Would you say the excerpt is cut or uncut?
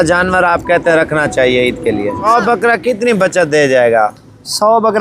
cut